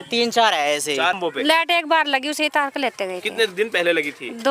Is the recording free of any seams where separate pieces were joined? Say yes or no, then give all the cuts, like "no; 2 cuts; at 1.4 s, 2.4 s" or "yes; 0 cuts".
no; 1 cut; at 1.2 s